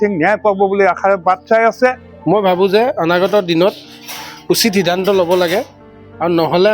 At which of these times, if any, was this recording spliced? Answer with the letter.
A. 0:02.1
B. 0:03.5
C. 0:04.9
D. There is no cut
A